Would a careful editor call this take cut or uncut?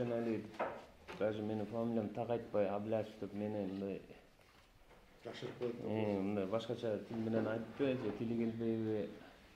uncut